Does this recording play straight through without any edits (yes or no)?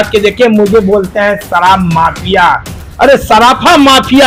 yes